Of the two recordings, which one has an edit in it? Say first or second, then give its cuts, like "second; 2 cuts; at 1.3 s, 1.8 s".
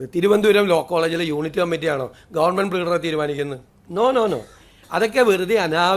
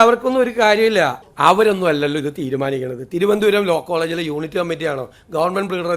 second; 1 cut; at 1.2 s